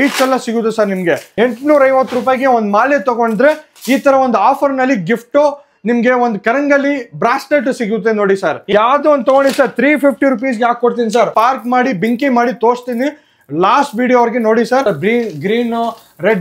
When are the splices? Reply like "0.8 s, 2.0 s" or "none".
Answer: 1.3 s, 8.6 s, 11.3 s, 14.8 s

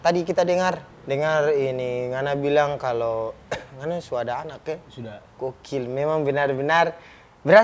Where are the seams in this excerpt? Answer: 0.9 s

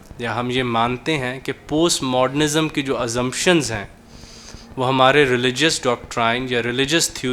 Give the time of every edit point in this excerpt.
none

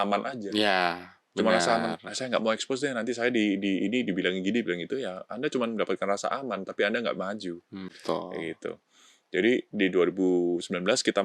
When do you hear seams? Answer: none

